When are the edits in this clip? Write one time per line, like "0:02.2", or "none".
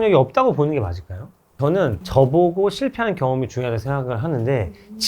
0:01.6